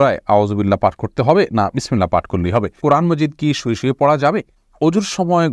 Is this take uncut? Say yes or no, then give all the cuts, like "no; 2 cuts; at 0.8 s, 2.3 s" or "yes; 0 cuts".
no; 2 cuts; at 2.8 s, 4.6 s